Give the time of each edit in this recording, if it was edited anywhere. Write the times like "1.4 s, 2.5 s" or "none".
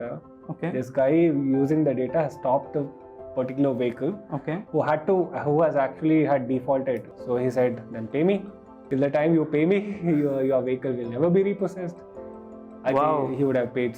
7.1 s, 8.8 s